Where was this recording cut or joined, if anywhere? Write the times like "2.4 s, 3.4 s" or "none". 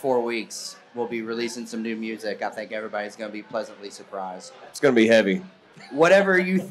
4.7 s, 5.8 s